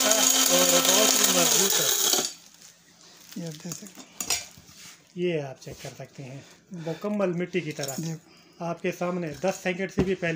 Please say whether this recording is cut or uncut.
uncut